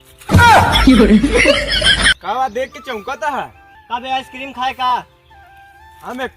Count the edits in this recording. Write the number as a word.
one